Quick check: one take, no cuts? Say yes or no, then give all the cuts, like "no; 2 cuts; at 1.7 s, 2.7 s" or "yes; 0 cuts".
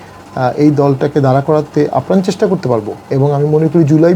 no; 1 cut; at 3.0 s